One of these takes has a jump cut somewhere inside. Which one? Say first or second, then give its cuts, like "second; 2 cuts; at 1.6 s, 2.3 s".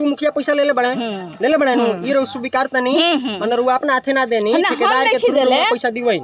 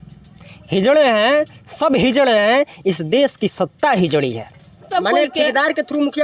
second; 1 cut; at 4.9 s